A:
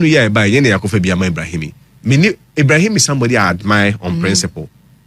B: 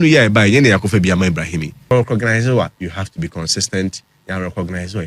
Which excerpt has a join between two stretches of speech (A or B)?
B